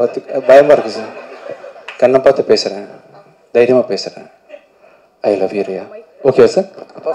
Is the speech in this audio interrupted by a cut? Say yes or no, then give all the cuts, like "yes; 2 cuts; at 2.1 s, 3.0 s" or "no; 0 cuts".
no; 0 cuts